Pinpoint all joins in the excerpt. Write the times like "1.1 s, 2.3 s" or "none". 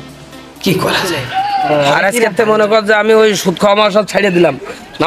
1.2 s